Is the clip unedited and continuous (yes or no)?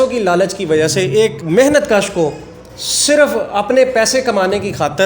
no